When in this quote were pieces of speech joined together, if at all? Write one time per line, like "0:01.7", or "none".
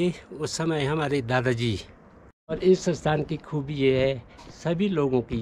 0:02.4